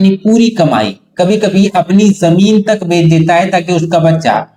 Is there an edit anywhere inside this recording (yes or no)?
no